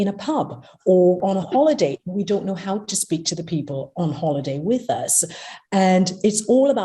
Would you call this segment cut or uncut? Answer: cut